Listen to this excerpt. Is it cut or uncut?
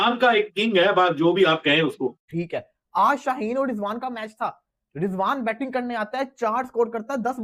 cut